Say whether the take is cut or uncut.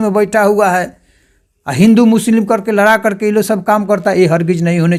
uncut